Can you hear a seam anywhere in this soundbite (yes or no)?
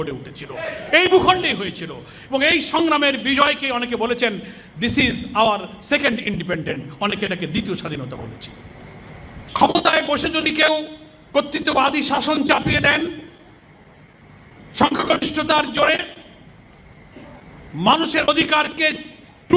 yes